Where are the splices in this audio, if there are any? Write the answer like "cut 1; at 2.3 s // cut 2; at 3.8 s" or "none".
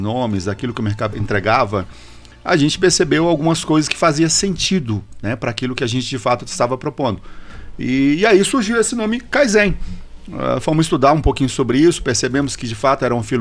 cut 1; at 1.2 s